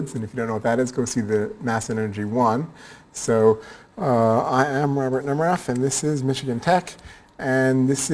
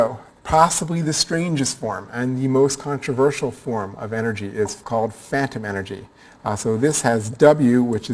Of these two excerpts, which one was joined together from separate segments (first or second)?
first